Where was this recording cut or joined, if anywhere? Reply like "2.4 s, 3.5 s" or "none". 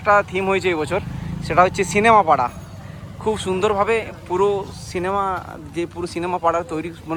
none

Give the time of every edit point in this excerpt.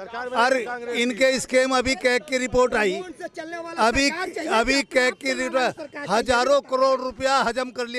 none

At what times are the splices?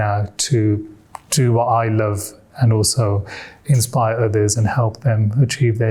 none

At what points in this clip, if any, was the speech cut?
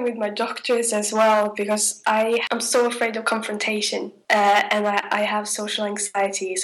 2.4 s, 4.2 s

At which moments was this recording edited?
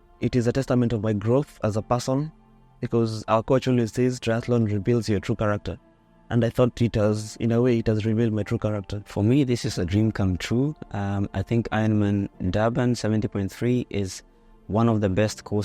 9.1 s

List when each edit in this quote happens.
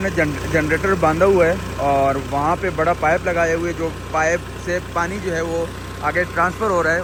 none

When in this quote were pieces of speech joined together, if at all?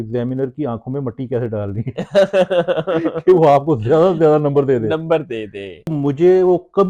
5.9 s

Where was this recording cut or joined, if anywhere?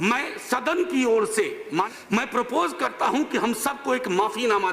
1.9 s

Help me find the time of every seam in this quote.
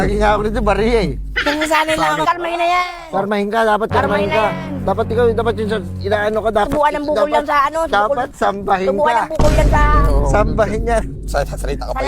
2.2 s

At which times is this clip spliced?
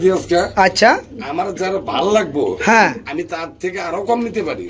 none

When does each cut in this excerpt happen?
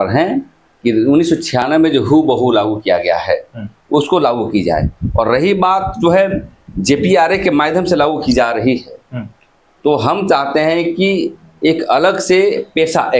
none

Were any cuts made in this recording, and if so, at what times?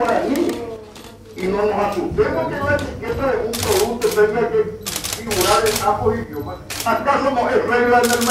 none

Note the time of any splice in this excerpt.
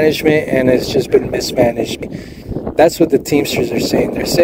2.0 s

